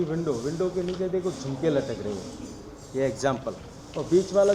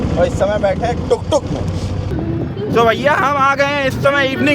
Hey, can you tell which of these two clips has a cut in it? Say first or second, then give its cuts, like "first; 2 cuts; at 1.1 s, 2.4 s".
second; 1 cut; at 2.0 s